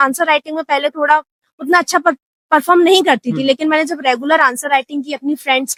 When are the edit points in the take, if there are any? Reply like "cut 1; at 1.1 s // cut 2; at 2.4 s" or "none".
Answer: none